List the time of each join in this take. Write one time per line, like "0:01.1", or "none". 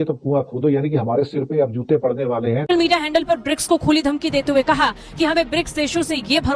0:02.6